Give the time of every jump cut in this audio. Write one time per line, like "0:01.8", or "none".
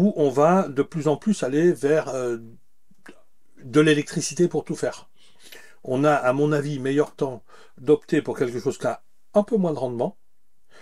none